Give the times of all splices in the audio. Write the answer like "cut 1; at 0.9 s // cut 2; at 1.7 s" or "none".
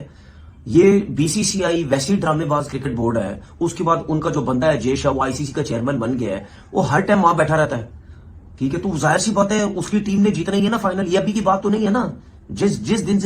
none